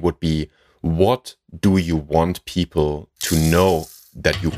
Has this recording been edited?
no; 0 cuts

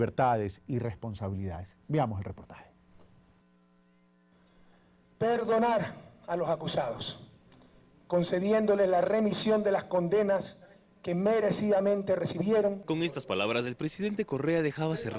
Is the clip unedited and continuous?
yes; 0 cuts

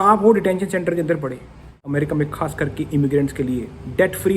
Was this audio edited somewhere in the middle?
yes; 1 cut; at 1.8 s

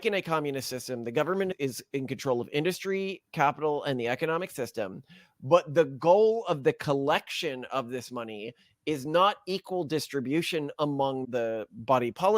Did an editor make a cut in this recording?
yes; 2 cuts; at 1.5 s, 11.2 s

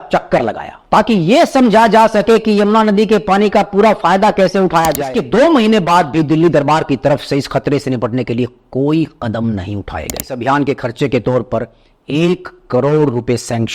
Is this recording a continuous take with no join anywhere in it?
no; 2 cuts; at 5.0 s, 10.3 s

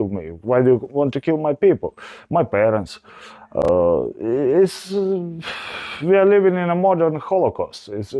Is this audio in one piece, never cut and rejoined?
yes; 0 cuts

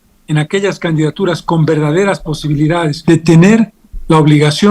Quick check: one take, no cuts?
no; 1 cut; at 3.0 s

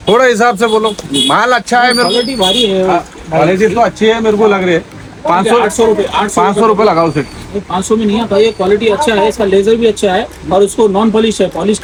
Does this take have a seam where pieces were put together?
no; 0 cuts

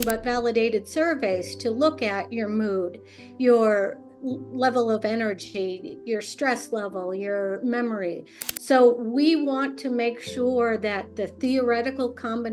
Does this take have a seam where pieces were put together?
no; 0 cuts

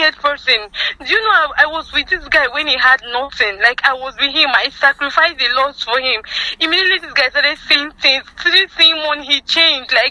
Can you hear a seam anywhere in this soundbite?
no; 0 cuts

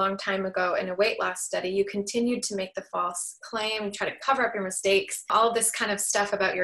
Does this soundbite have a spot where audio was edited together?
yes; 1 cut; at 5.3 s

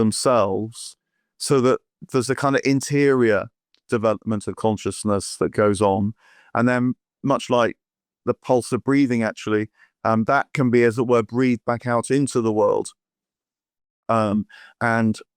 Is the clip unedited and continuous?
yes; 0 cuts

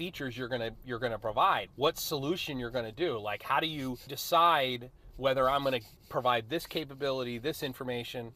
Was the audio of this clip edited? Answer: yes; 2 cuts; at 1.7 s, 4.1 s

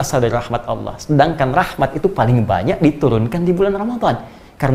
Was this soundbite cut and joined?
no; 0 cuts

